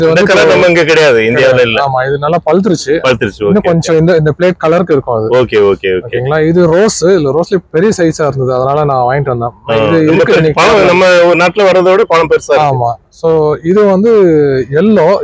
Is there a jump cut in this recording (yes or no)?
no